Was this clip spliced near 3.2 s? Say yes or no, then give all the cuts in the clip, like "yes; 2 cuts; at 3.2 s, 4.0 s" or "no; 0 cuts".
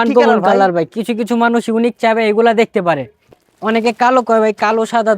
yes; 1 cut; at 3.2 s